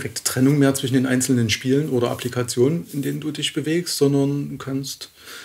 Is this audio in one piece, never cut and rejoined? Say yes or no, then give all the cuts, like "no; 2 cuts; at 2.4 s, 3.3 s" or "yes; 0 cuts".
yes; 0 cuts